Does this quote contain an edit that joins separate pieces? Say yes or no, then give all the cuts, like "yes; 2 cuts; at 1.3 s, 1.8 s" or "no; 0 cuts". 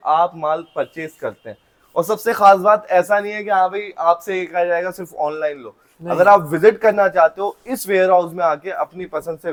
no; 0 cuts